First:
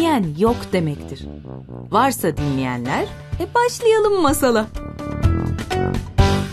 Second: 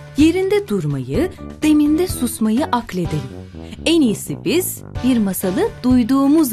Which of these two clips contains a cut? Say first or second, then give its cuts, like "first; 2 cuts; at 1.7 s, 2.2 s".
first; 1 cut; at 4.8 s